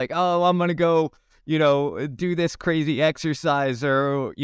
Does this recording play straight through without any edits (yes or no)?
yes